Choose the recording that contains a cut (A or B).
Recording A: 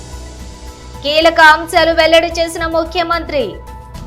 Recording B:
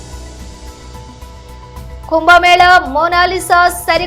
A